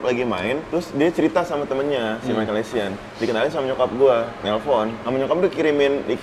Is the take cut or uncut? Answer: cut